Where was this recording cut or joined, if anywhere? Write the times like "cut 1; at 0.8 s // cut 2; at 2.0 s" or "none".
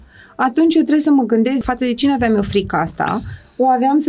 cut 1; at 1.6 s